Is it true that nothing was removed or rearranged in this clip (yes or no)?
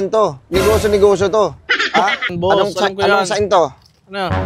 no